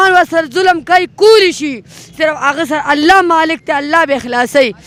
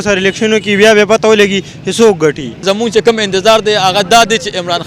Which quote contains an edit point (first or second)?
second